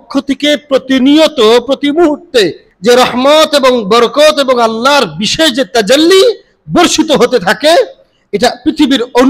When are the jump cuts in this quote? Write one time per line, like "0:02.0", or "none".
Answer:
0:02.7